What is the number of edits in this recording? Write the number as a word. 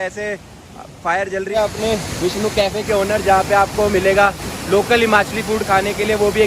one